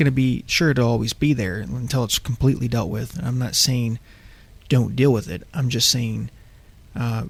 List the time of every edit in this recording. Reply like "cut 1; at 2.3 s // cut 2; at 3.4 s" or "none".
none